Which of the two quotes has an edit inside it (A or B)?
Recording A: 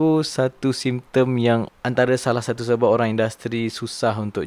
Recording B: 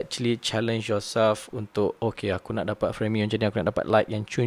A